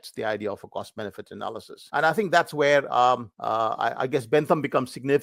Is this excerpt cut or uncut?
cut